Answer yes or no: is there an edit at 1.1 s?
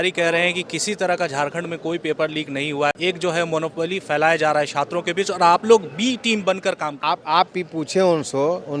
no